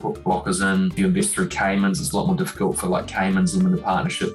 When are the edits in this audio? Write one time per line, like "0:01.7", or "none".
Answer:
0:00.9